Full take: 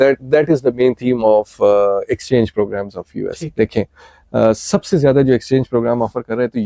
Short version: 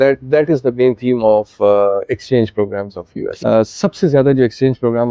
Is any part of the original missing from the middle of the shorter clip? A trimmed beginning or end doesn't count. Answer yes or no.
yes